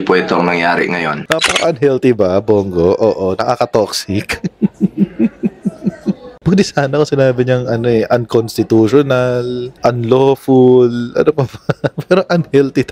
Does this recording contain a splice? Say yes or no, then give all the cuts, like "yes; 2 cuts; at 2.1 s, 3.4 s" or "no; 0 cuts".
yes; 1 cut; at 1.2 s